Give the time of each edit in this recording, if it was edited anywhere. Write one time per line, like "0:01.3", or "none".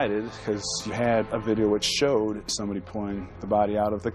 0:02.4